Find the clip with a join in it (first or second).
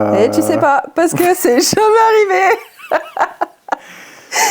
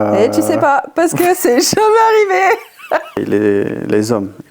second